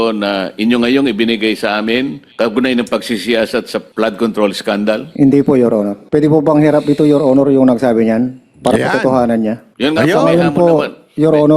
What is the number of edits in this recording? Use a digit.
5